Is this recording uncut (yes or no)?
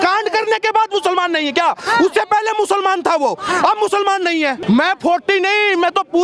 no